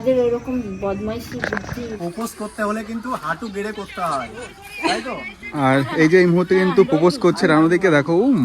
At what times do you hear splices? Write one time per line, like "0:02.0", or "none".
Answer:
0:02.0